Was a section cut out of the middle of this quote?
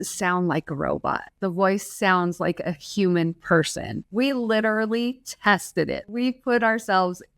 yes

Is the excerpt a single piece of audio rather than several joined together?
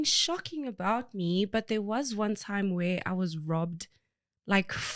yes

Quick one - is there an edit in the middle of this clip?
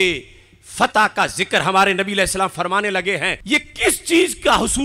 yes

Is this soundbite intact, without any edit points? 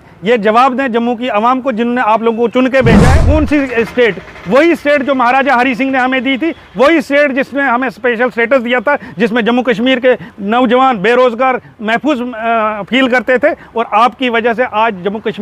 no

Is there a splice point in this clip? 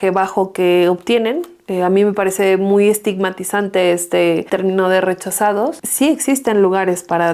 yes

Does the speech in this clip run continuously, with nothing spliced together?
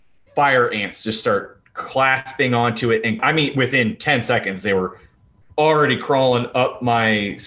no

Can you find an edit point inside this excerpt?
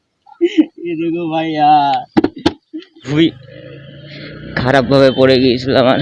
yes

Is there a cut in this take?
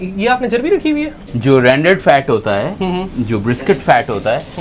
yes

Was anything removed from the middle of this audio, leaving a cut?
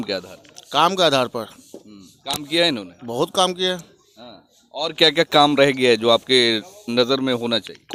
no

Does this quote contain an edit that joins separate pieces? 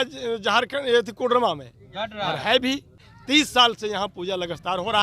yes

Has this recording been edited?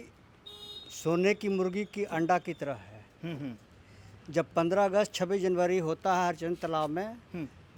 no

